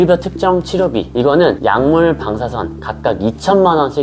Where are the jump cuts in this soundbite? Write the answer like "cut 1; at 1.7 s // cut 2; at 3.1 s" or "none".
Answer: none

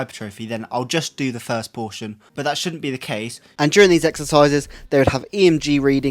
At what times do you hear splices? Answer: cut 1; at 2.2 s // cut 2; at 3.4 s

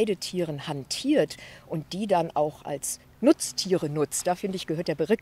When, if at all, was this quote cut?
none

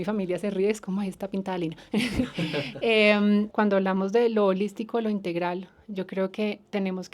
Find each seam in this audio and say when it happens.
cut 1; at 3.5 s

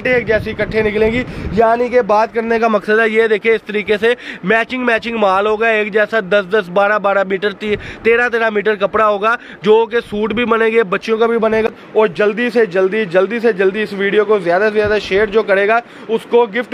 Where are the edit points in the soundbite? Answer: cut 1; at 11.7 s

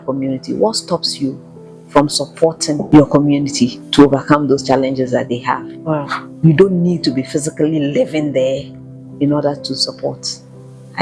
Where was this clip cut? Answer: cut 1; at 2.8 s // cut 2; at 3.8 s // cut 3; at 6.2 s

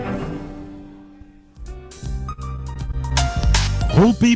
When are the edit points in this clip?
cut 1; at 1.8 s

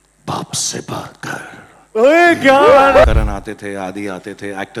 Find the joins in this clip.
cut 1; at 3.0 s

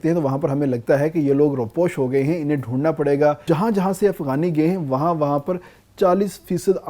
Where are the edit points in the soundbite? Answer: cut 1; at 3.4 s

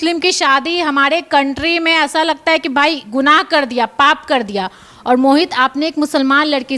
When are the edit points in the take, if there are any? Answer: none

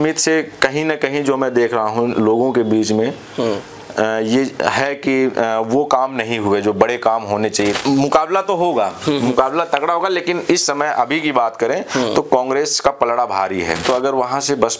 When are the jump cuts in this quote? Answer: cut 1; at 7.7 s // cut 2; at 13.8 s

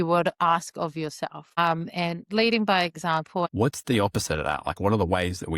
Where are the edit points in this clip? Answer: cut 1; at 3.5 s

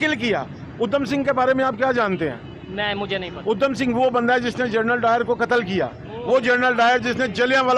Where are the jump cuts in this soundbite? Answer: none

